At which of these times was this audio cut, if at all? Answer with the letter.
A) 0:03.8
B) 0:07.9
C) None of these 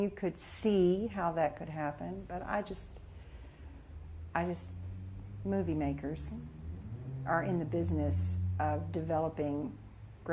B